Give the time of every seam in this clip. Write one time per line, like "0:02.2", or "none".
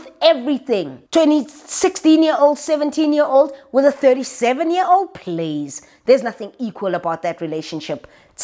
0:01.0